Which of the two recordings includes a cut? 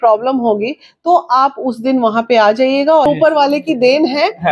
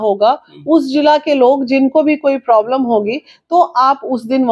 first; 1 cut; at 3.1 s

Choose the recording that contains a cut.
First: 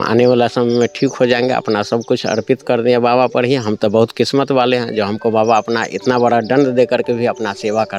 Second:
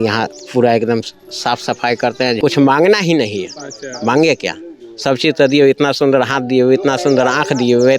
second; 1 cut; at 2.4 s

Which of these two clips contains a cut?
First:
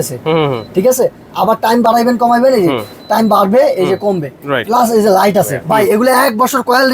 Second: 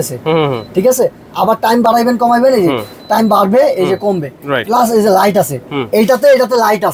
first; 1 cut; at 5.6 s

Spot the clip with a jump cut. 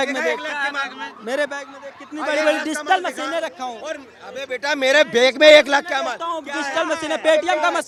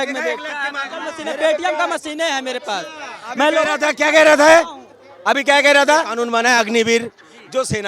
second; 2 cuts; at 1.1 s, 6.2 s

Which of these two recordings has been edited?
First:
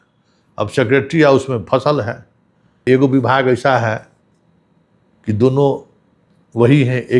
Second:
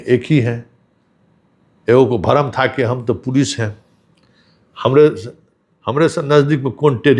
first; 1 cut; at 2.7 s

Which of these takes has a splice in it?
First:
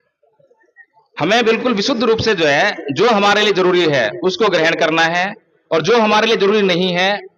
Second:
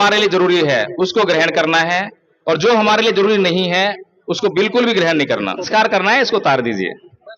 second; 1 cut; at 5.6 s

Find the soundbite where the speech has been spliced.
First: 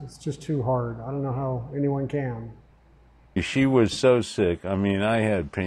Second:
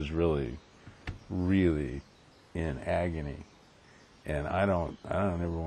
first; 1 cut; at 3.4 s

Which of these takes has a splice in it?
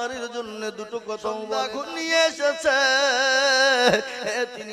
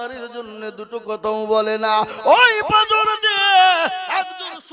first; 1 cut; at 1.7 s

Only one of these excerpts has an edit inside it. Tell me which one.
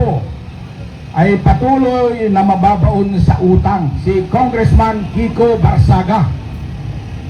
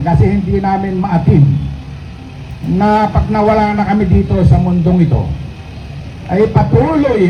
first; 1 cut; at 3.9 s

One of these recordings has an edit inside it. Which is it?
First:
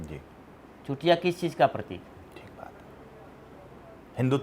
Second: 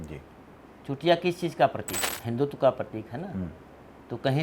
second; 1 cut; at 2.1 s

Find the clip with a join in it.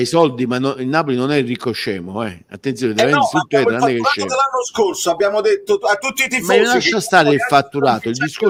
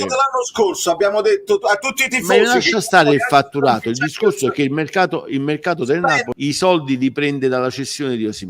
second; 1 cut; at 6.3 s

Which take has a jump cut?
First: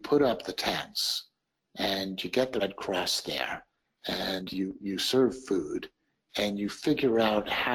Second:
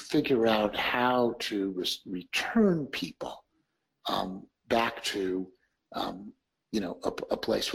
first; 1 cut; at 2.6 s

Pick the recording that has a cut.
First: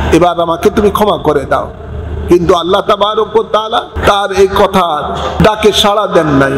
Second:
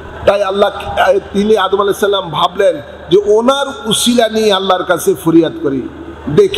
first; 2 cuts; at 3.9 s, 5.3 s

